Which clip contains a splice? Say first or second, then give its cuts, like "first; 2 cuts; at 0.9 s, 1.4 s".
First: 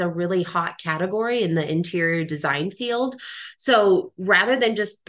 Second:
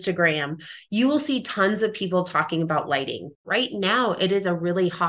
second; 1 cut; at 3.5 s